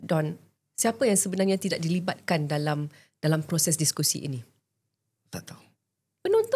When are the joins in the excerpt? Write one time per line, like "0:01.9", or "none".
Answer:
none